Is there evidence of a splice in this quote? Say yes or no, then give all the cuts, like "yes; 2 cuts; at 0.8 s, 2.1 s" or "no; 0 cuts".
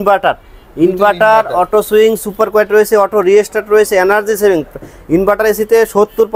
no; 0 cuts